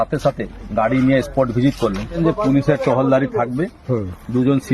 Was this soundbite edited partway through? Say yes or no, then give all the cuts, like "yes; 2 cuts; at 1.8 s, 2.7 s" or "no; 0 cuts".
yes; 1 cut; at 2.1 s